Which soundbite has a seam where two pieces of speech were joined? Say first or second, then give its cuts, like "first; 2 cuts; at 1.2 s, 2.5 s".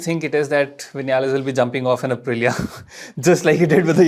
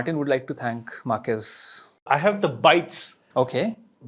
second; 1 cut; at 2.0 s